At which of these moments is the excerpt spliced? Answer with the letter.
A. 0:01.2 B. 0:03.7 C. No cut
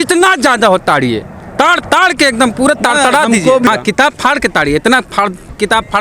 B